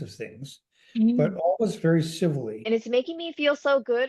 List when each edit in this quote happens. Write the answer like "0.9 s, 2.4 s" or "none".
2.6 s